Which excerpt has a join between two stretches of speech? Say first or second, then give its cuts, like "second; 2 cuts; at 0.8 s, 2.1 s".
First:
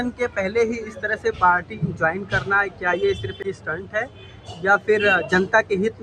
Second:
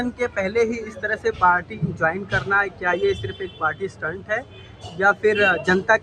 first; 1 cut; at 3.4 s